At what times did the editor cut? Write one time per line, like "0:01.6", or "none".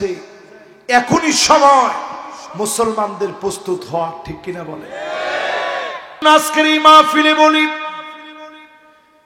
0:06.2